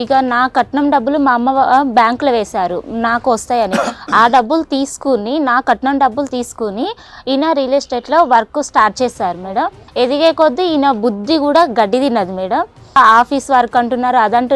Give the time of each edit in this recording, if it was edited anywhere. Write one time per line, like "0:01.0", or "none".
0:09.8
0:13.0